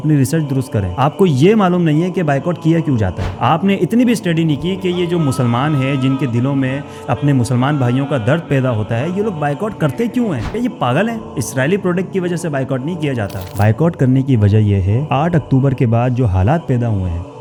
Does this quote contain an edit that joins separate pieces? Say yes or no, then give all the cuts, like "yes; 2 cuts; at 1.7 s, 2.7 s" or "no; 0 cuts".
no; 0 cuts